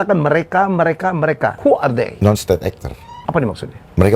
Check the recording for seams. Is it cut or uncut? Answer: cut